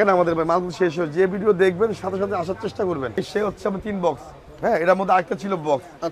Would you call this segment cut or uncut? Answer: cut